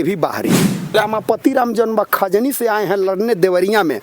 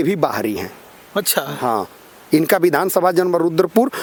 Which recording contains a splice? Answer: first; 1 cut; at 0.9 s

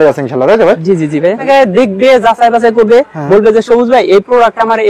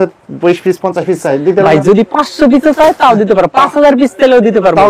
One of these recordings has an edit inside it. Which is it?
first; 1 cut; at 1.4 s

